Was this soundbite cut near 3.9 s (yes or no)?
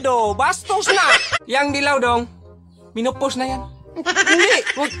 no